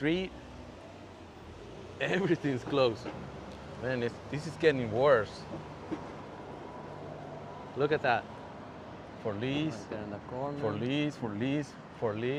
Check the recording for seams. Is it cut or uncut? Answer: uncut